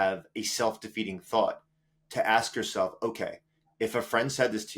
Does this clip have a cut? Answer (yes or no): no